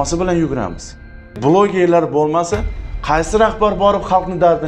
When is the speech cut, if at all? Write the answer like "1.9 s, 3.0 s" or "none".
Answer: 1.4 s